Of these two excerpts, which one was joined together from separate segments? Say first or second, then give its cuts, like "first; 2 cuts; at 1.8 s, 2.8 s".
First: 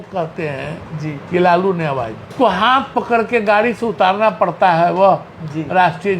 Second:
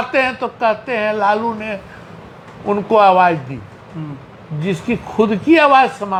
first; 1 cut; at 2.3 s